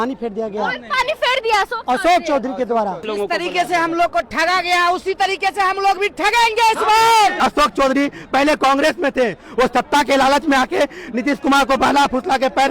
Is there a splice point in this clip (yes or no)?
yes